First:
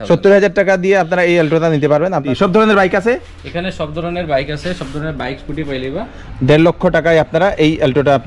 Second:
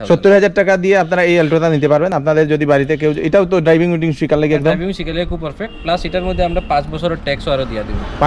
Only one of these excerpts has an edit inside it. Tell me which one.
first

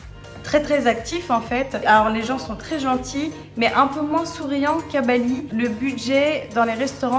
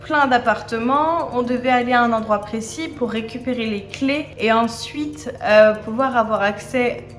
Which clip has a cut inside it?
first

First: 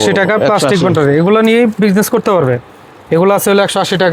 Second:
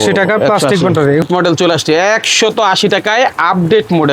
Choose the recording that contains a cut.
second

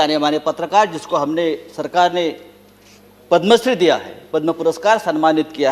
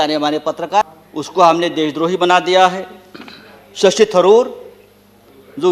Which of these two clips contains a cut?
second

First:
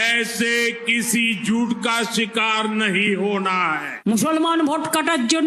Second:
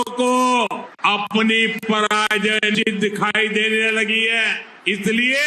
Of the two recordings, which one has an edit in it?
first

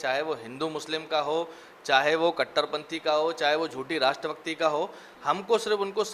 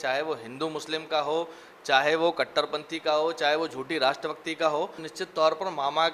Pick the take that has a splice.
second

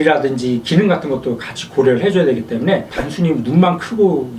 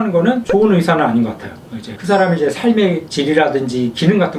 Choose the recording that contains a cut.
second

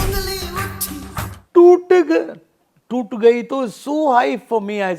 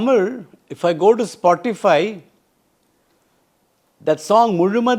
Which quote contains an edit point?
first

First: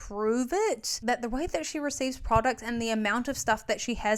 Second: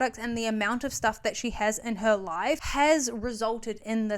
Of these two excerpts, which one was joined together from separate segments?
second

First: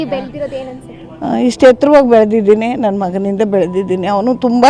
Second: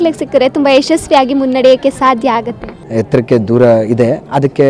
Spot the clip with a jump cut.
second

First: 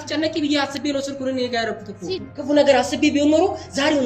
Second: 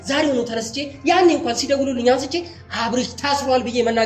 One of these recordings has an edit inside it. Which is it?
first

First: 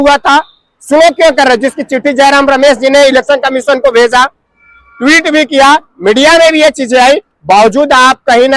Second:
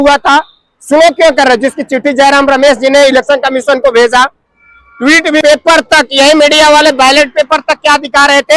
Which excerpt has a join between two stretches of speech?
second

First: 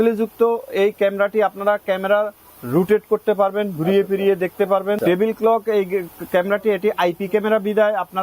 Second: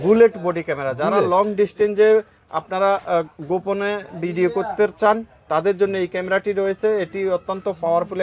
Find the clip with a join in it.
first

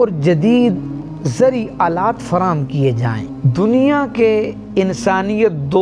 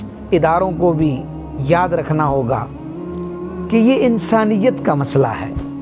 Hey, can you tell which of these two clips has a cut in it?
first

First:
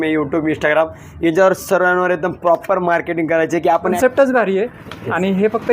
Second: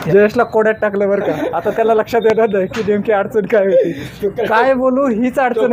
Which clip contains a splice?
first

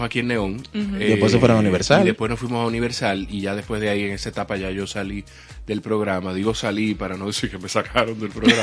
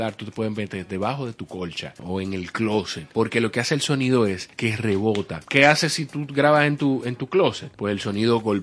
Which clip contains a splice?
second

